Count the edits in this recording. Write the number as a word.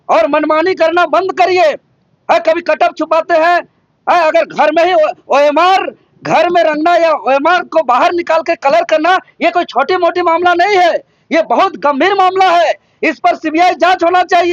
zero